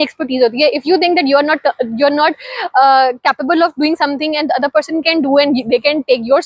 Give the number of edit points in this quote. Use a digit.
0